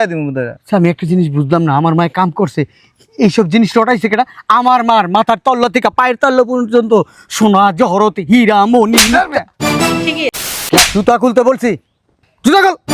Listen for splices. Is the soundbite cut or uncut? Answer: cut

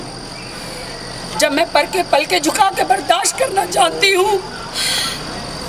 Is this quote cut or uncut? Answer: uncut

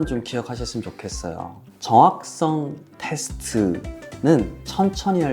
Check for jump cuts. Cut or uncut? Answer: uncut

